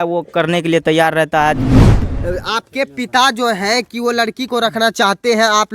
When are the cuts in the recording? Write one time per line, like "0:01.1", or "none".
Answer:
0:02.0